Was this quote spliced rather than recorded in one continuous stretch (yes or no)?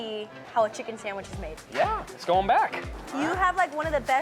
yes